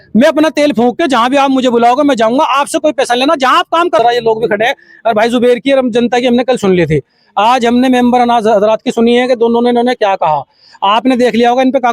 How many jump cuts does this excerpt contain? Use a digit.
1